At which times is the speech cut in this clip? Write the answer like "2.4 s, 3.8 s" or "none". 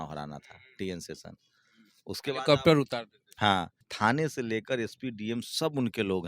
3.8 s